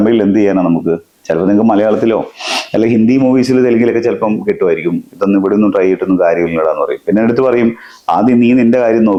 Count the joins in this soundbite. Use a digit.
0